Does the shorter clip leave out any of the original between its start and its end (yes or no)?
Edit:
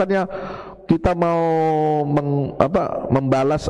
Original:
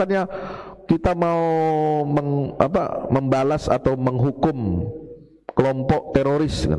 no